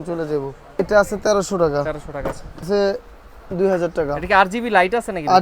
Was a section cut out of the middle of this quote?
yes; 2 cuts; at 0.8 s, 2.7 s

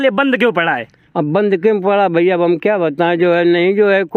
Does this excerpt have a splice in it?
no; 0 cuts

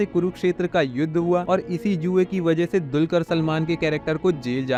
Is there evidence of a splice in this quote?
no; 0 cuts

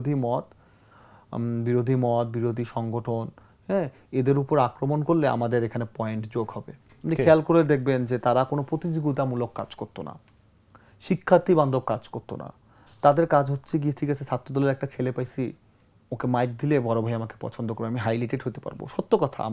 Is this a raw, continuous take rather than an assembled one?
yes; 0 cuts

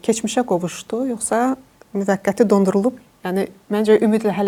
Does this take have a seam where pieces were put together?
no; 0 cuts

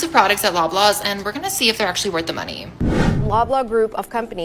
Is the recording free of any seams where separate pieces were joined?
no; 1 cut; at 2.7 s

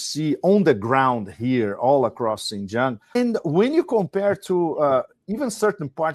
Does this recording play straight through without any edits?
no; 1 cut; at 3.1 s

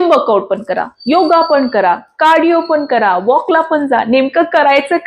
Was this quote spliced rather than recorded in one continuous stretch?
no; 0 cuts

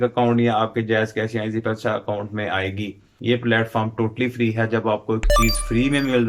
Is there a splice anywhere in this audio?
yes; 1 cut; at 3.1 s

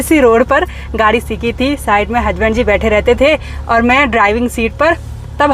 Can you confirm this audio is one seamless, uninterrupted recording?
yes; 0 cuts

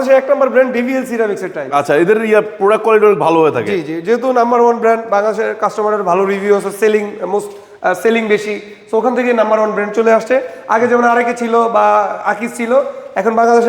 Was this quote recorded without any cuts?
yes; 0 cuts

